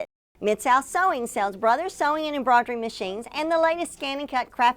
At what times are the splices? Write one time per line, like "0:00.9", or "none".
none

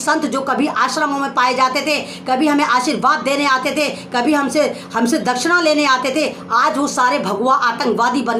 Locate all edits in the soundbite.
none

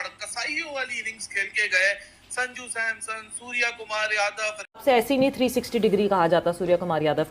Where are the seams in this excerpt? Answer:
0:04.8

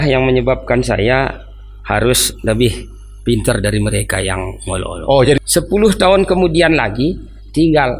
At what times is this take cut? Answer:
0:05.4

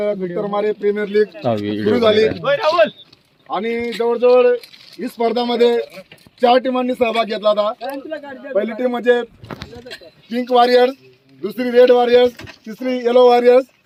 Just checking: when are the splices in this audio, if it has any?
none

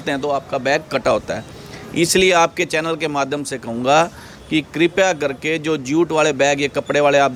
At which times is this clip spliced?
none

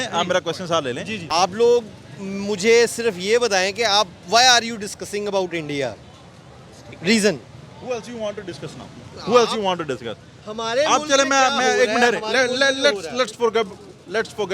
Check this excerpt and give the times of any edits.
0:01.2

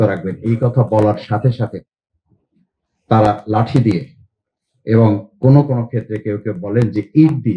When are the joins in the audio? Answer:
none

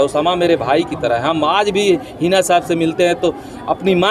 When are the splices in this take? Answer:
none

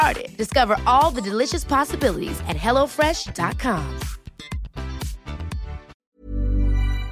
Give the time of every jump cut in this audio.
0:05.9

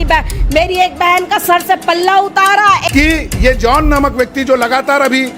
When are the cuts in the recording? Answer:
0:02.8

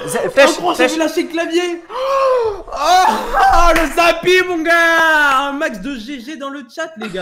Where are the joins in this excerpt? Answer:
none

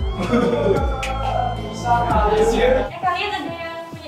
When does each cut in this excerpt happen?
0:02.9

